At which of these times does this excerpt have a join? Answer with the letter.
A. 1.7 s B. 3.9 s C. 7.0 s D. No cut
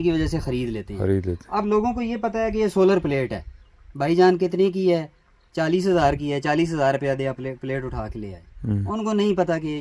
D